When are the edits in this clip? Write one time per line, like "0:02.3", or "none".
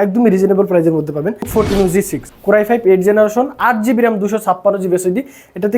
0:01.5
0:02.2

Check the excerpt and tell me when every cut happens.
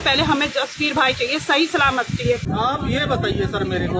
0:02.5

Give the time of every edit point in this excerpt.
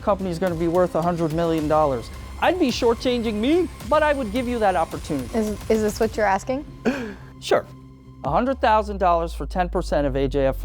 0:03.8
0:05.3

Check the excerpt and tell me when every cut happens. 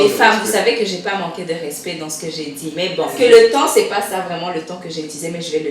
0:03.2

